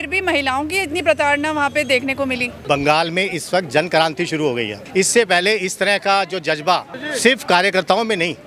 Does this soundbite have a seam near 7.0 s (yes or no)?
yes